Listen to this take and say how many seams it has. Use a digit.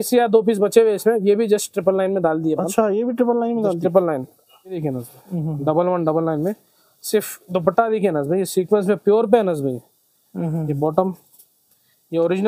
1